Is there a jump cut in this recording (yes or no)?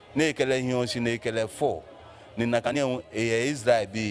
yes